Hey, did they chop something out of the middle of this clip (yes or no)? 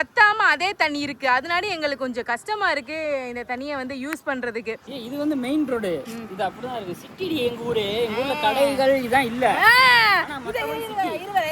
yes